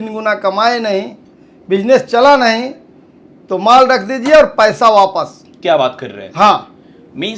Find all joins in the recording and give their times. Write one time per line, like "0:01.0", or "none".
none